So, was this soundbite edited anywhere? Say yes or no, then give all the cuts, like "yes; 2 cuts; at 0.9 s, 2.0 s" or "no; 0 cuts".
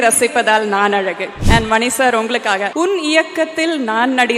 yes; 2 cuts; at 1.3 s, 2.7 s